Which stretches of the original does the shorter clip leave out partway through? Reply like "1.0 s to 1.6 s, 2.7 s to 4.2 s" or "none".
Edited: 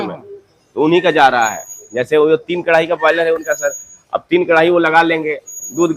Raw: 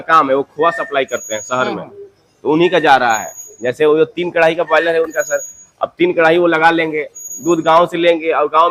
none